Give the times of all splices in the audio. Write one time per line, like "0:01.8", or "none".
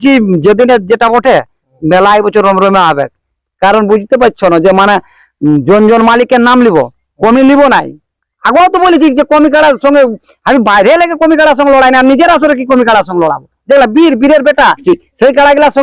0:14.8